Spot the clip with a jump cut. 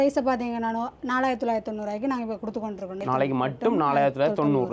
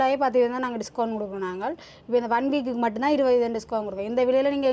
first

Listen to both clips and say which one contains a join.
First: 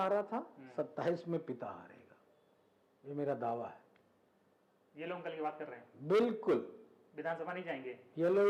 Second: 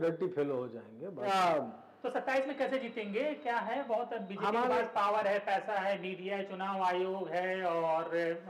second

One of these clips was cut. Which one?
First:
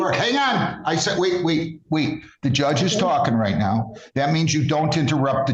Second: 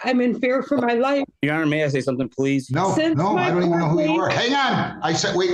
second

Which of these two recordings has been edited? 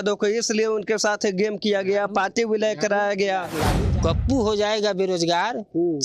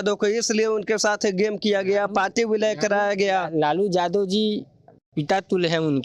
first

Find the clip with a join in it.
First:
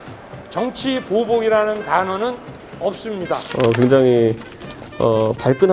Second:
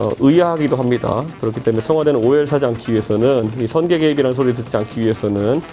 first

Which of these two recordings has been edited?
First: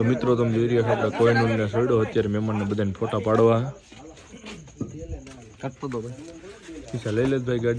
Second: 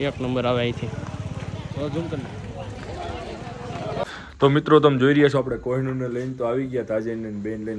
second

